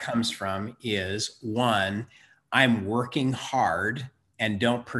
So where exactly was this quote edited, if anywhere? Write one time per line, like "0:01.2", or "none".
none